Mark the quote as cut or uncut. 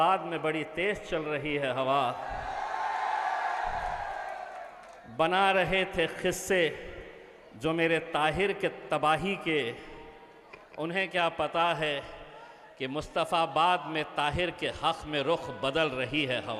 uncut